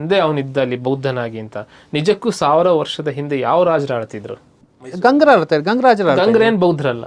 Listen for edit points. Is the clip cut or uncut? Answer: uncut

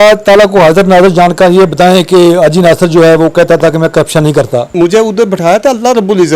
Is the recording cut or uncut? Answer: cut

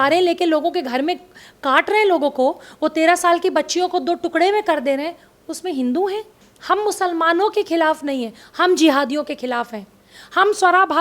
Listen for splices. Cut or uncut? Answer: cut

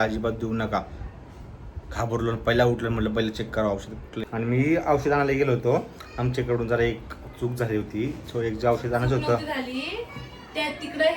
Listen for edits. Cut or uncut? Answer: cut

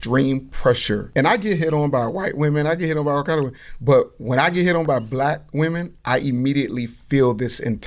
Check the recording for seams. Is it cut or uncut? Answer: cut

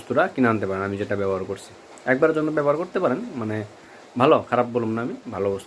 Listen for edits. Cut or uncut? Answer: uncut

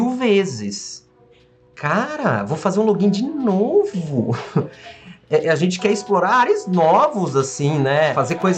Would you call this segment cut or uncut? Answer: cut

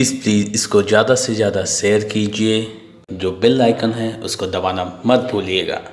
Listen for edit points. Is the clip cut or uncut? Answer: cut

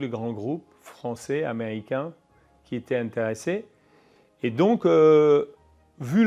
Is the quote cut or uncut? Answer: uncut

